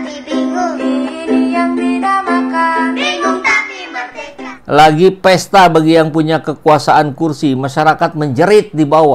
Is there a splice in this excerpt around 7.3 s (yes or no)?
no